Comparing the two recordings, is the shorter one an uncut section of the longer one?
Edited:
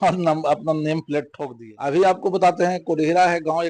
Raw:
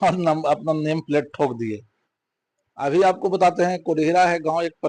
no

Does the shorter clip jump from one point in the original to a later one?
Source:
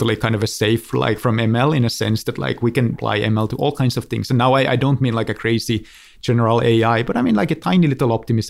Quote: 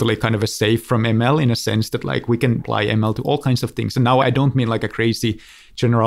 yes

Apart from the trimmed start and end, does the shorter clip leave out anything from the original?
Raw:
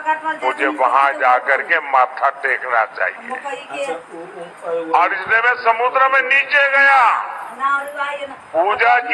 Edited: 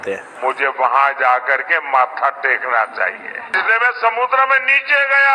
yes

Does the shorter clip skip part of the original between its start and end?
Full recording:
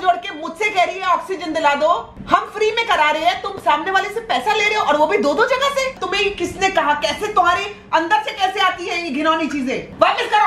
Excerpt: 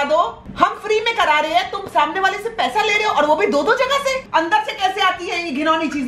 yes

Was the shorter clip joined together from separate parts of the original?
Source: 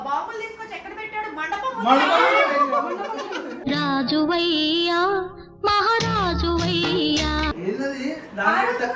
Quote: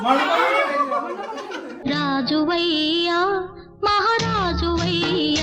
no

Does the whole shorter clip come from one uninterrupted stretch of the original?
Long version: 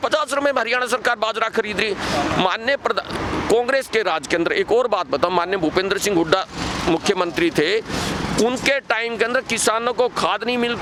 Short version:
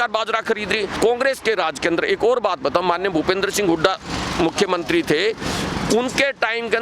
no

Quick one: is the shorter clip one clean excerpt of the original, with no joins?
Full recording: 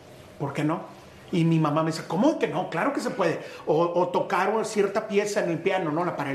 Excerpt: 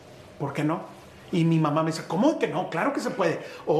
yes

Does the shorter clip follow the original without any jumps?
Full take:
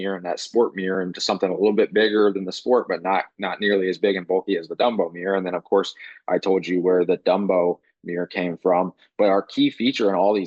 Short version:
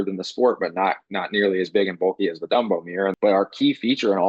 no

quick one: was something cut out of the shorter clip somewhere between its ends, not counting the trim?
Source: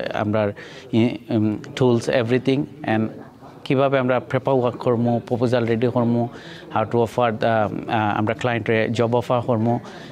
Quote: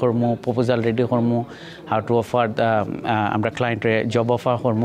no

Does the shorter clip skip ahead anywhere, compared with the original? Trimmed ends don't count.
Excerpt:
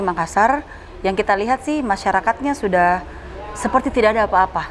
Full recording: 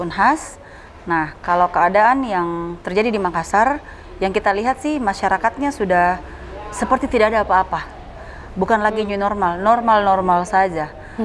no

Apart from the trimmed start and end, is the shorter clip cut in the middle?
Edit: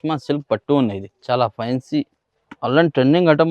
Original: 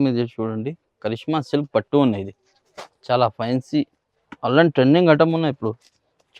yes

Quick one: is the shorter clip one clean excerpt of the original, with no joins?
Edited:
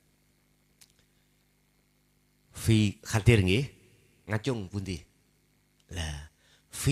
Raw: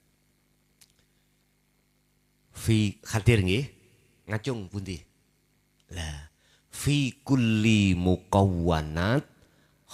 yes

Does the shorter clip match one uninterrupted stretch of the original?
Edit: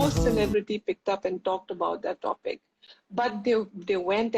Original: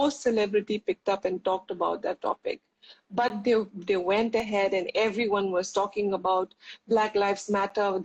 yes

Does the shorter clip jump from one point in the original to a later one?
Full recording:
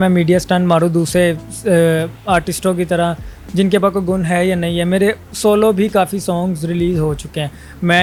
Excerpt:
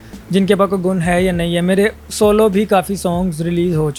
no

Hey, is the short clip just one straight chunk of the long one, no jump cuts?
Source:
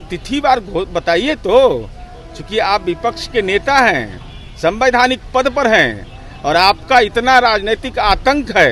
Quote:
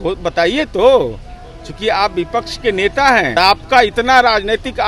no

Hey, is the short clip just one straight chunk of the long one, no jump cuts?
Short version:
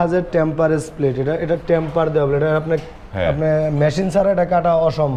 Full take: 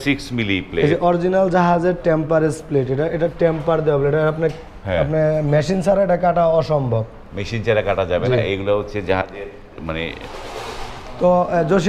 yes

